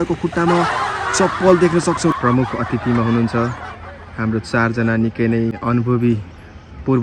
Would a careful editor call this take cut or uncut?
cut